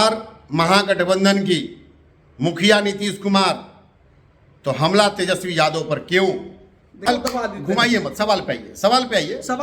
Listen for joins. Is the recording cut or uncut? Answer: cut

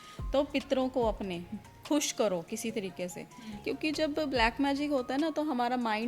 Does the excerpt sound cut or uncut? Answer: cut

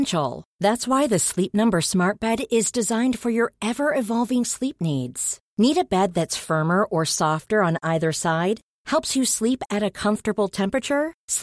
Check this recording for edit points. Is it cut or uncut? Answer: uncut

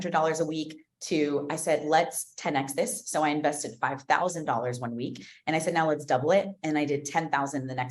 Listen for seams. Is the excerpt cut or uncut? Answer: uncut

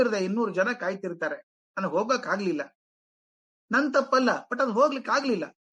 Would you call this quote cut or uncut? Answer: uncut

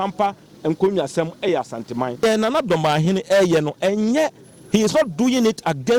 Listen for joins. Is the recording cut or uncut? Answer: cut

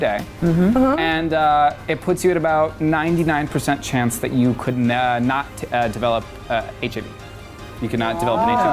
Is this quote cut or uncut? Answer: uncut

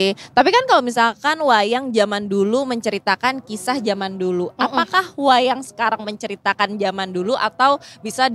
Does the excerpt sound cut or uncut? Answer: uncut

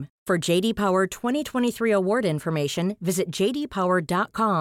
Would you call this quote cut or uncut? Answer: uncut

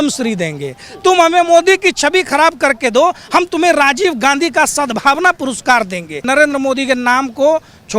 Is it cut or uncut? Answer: cut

